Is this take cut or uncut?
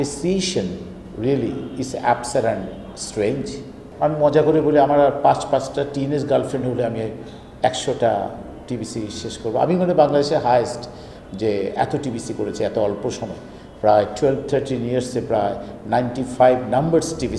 uncut